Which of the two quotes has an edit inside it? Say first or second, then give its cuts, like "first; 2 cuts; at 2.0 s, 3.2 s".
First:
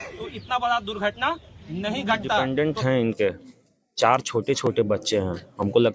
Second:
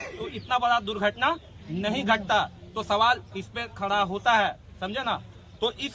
first; 1 cut; at 2.5 s